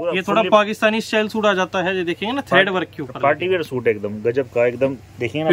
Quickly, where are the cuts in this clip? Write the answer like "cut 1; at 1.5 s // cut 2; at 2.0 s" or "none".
none

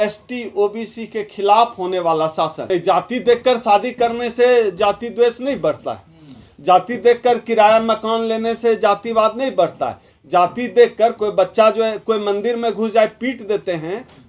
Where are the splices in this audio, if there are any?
cut 1; at 2.6 s

